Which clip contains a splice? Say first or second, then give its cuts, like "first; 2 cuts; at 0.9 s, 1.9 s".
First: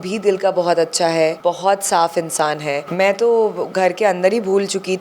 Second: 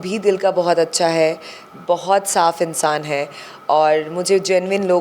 first; 2 cuts; at 1.4 s, 2.9 s